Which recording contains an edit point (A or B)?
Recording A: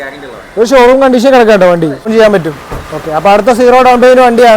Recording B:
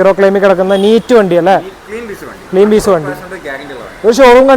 A